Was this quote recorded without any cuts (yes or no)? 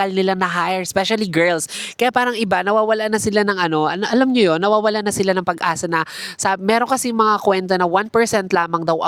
yes